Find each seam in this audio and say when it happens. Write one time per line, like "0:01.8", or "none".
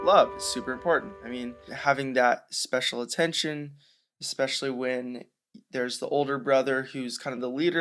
0:01.7